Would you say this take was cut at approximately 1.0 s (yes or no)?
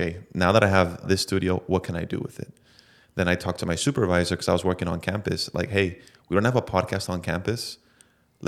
yes